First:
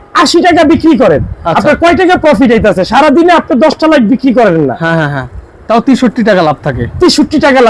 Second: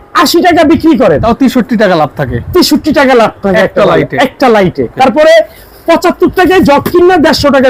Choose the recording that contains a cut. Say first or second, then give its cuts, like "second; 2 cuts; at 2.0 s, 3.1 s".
second; 2 cuts; at 1.2 s, 4.9 s